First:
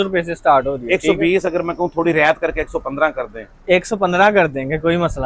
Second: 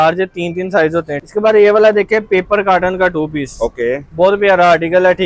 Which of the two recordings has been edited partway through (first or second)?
second